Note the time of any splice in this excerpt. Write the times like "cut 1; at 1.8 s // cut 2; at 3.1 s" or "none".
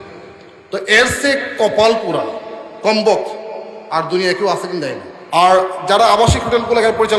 cut 1; at 5.1 s